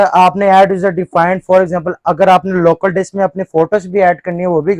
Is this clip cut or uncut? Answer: uncut